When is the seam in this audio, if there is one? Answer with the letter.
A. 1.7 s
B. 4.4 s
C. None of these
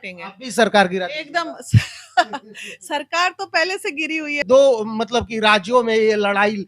B